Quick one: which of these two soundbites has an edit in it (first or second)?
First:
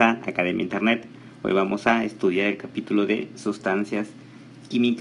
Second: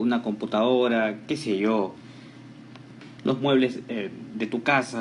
second